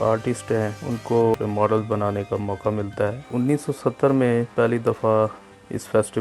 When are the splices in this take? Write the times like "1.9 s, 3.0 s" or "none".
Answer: 1.1 s, 3.3 s